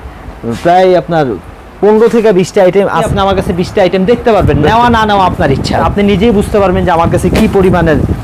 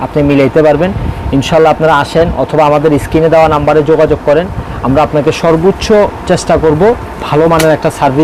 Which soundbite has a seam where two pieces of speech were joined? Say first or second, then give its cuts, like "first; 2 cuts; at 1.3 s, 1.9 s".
first; 2 cuts; at 3.1 s, 5.8 s